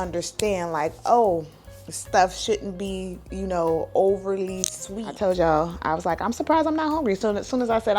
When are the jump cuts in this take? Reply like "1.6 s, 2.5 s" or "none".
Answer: 5.0 s